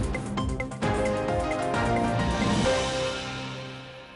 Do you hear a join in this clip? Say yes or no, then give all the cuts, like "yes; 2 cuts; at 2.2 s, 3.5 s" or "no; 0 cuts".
no; 0 cuts